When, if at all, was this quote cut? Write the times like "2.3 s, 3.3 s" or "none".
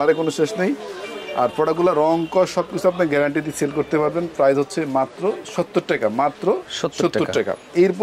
none